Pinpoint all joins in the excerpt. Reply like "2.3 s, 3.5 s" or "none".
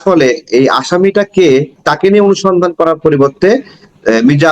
1.8 s